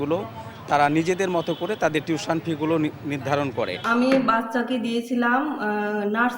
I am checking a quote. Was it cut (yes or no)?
yes